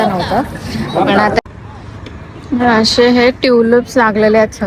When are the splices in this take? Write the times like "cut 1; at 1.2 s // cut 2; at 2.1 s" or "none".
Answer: cut 1; at 1.4 s